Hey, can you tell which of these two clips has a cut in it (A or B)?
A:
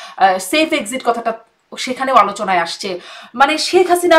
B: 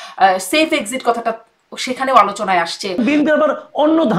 B